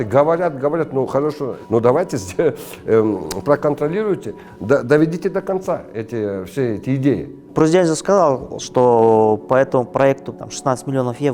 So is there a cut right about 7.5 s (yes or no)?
yes